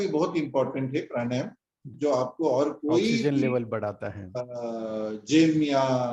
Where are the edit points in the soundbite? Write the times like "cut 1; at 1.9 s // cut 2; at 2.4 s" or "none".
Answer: cut 1; at 1.9 s